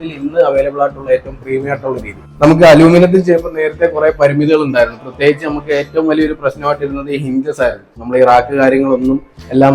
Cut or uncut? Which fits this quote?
cut